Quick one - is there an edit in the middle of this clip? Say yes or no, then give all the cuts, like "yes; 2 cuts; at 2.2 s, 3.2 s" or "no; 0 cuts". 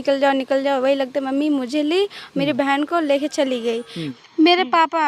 yes; 1 cut; at 4.0 s